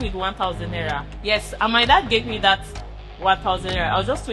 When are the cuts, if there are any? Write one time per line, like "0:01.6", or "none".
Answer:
0:01.1